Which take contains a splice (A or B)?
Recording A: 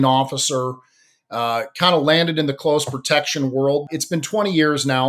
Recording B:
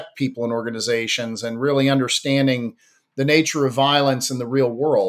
A